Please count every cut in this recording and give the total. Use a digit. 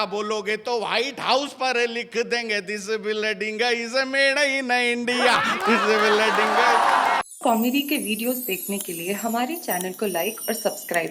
1